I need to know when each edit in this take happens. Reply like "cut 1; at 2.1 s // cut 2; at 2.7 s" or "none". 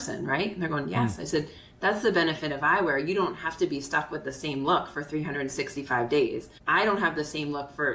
cut 1; at 6.5 s

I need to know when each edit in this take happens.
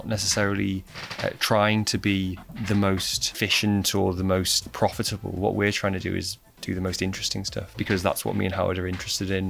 cut 1; at 2.5 s // cut 2; at 3.2 s // cut 3; at 4.6 s // cut 4; at 7.7 s

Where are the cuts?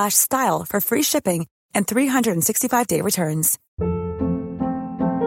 cut 1; at 3.6 s

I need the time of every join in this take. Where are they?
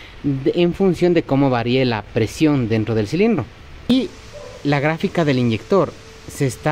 cut 1; at 3.9 s

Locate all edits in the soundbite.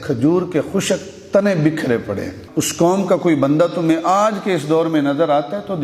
cut 1; at 2.3 s

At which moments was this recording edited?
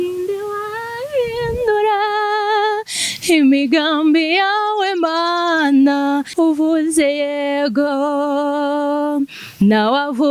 cut 1; at 6.3 s

